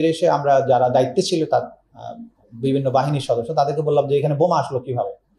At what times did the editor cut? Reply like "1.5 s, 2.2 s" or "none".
none